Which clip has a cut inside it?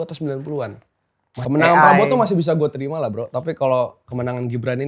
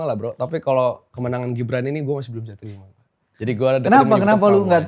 first; 1 cut; at 1.4 s

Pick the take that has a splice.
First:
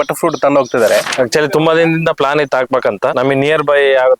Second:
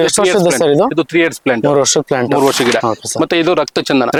first; 1 cut; at 1.1 s

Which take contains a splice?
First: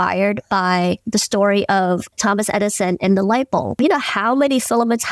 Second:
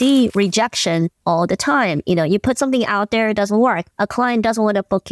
first; 3 cuts; at 1.0 s, 2.1 s, 3.8 s

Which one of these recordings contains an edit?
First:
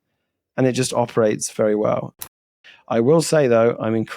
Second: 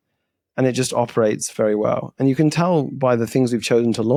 first; 1 cut; at 2.2 s

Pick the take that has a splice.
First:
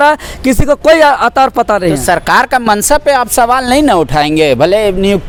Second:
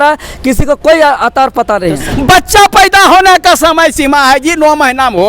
second; 1 cut; at 2.0 s

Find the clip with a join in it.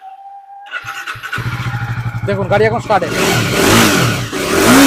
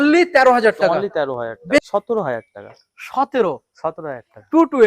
second; 1 cut; at 1.8 s

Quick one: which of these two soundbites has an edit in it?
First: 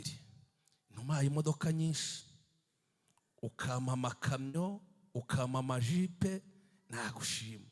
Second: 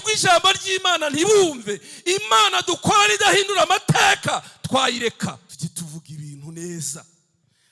second; 1 cut; at 5.4 s

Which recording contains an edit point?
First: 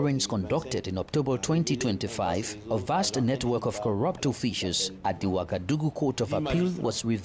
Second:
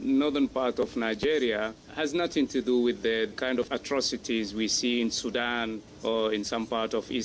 second; 3 cuts; at 1.8 s, 3.4 s, 5.9 s

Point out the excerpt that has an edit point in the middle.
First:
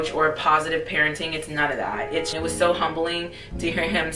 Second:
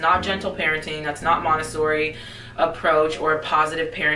first; 1 cut; at 2.3 s

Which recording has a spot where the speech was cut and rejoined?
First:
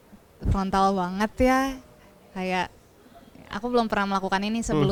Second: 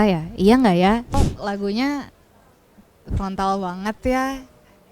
second; 1 cut; at 1.1 s

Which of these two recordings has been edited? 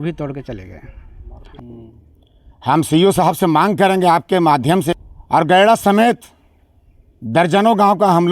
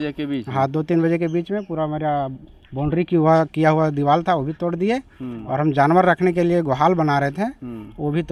first; 2 cuts; at 1.4 s, 5.0 s

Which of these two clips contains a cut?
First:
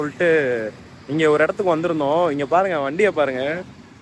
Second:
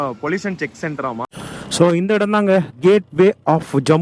second; 1 cut; at 1.4 s

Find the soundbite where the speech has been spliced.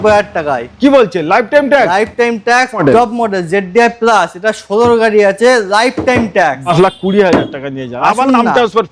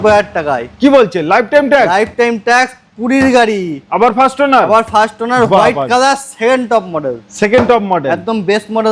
first; 2 cuts; at 2.8 s, 6.7 s

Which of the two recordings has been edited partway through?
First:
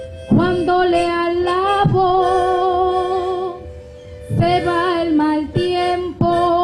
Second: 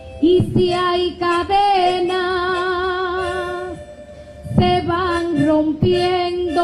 second; 1 cut; at 4.1 s

